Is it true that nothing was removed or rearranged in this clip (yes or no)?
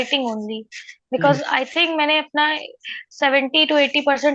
yes